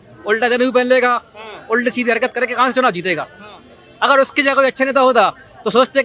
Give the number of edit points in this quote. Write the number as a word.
zero